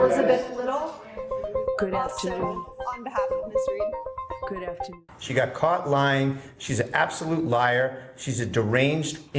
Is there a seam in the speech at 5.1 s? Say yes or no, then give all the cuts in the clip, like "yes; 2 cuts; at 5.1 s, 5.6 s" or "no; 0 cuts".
yes; 1 cut; at 5.1 s